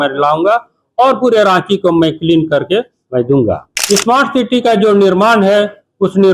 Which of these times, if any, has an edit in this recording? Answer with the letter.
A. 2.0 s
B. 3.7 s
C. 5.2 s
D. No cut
B